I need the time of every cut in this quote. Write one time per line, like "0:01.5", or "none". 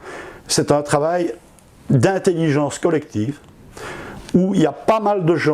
none